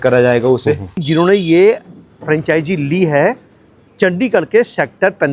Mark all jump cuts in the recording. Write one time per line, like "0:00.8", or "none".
0:01.0